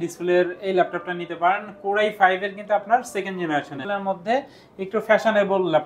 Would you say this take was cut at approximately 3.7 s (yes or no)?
yes